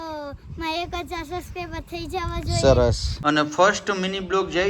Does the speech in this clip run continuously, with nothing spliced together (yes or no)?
no